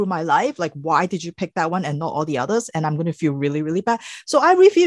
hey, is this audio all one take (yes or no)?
yes